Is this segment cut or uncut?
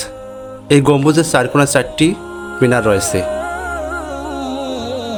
uncut